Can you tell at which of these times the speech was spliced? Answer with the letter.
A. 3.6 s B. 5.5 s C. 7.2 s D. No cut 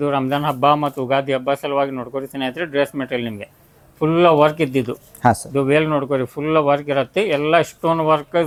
D